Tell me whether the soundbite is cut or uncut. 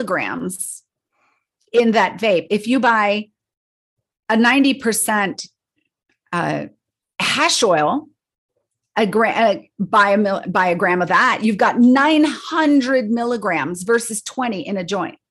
uncut